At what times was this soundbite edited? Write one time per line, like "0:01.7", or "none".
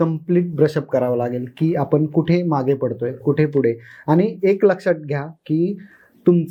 none